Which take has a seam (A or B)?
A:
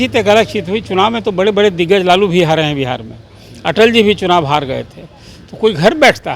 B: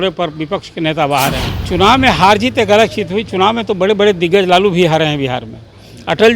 B